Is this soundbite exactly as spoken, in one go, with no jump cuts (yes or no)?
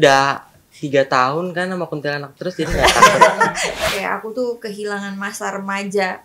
no